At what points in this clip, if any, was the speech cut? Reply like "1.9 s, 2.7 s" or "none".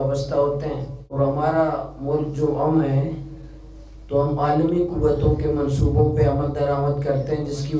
1.1 s